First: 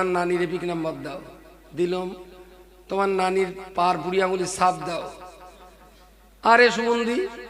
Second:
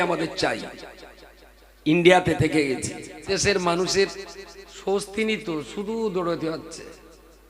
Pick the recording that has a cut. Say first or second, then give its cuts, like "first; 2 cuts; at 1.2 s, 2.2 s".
second; 1 cut; at 3.3 s